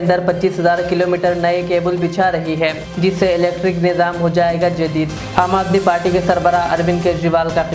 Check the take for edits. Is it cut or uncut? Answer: uncut